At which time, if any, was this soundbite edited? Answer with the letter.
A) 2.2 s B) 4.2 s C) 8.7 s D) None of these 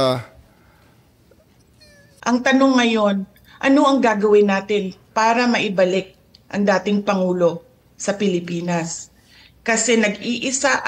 A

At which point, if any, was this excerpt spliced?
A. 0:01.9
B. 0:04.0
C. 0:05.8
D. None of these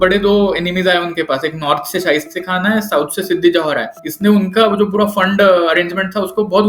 D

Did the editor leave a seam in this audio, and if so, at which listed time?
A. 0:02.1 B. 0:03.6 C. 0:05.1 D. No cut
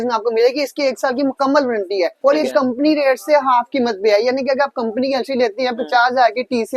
A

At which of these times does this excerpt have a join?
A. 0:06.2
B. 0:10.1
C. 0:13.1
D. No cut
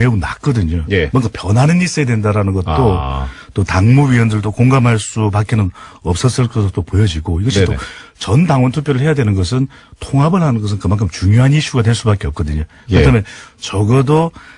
A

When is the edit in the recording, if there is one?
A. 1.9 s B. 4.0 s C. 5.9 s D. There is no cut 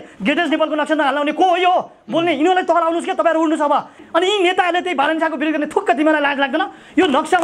B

